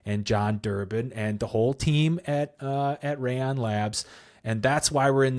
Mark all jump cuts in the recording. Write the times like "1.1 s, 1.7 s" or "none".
none